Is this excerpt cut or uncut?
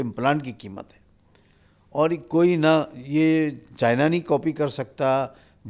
uncut